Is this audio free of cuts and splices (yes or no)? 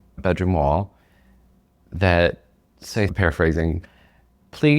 no